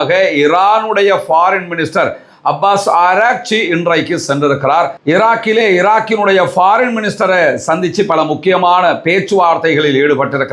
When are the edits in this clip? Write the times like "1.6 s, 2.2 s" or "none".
none

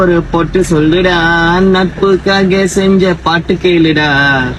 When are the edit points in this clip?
none

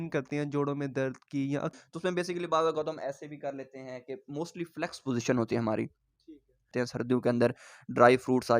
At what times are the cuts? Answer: 1.7 s, 6.7 s

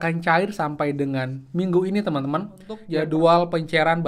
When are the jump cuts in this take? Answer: 2.8 s

